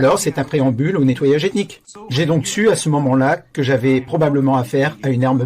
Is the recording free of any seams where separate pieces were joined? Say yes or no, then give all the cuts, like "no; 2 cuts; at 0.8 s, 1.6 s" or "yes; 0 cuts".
no; 1 cut; at 1.8 s